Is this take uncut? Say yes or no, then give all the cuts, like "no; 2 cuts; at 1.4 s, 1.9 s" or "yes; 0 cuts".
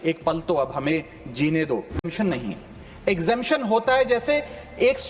no; 1 cut; at 2.1 s